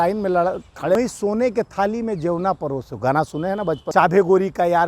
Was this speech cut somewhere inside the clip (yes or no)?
yes